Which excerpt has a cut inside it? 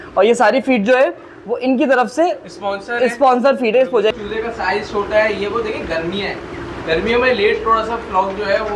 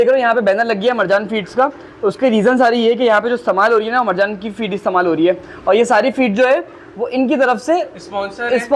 first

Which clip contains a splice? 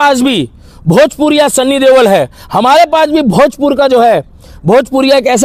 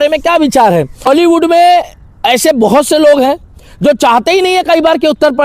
second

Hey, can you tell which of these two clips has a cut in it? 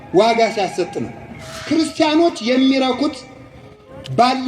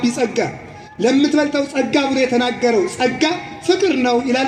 first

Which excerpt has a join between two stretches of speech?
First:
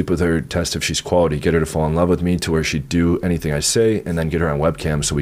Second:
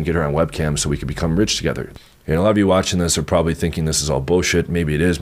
second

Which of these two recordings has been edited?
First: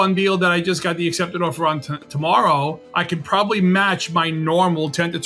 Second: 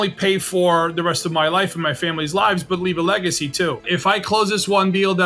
second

